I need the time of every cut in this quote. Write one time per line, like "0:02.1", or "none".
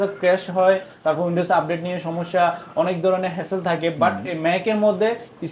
none